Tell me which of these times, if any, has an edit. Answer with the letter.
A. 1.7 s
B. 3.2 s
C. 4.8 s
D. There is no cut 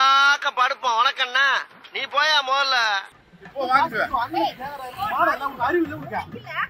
B